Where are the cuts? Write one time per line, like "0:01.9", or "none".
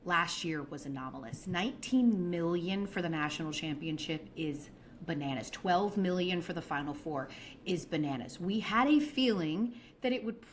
0:05.9